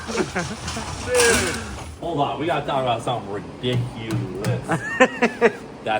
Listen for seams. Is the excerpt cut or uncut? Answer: cut